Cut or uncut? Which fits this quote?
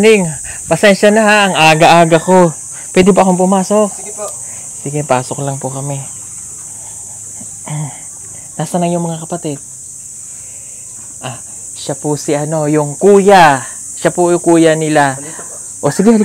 uncut